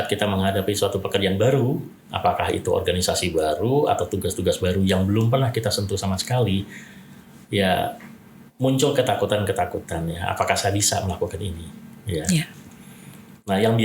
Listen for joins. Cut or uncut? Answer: uncut